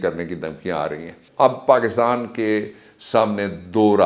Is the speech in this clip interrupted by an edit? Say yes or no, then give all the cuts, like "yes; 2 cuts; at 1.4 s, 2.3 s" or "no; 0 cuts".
yes; 1 cut; at 1.2 s